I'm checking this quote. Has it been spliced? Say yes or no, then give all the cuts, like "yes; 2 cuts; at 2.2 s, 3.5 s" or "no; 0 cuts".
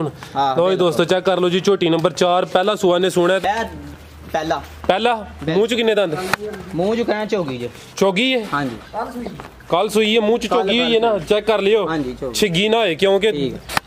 yes; 1 cut; at 3.4 s